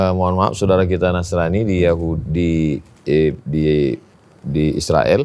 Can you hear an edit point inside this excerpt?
no; 0 cuts

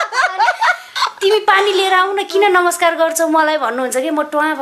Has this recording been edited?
no; 0 cuts

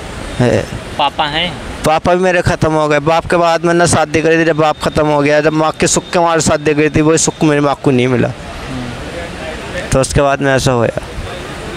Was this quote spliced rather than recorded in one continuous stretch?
no; 0 cuts

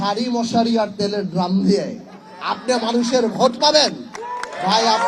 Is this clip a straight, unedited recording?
yes; 0 cuts

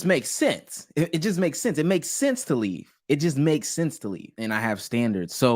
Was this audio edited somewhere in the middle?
yes; 1 cut; at 4.3 s

